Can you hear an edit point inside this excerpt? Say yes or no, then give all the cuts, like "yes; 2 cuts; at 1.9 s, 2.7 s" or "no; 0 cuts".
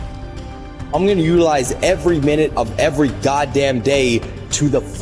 yes; 1 cut; at 0.9 s